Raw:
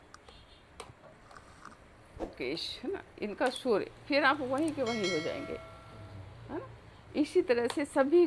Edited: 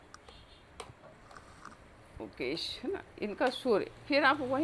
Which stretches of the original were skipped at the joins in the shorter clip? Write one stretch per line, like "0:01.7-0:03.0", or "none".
none